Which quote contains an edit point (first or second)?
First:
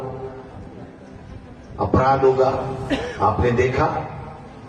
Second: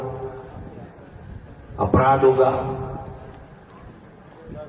first